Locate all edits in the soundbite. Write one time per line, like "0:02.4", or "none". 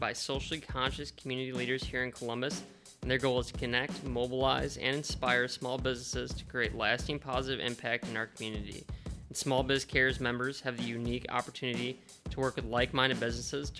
none